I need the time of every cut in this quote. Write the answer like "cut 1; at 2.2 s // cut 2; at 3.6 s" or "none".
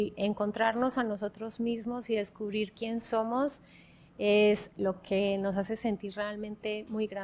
none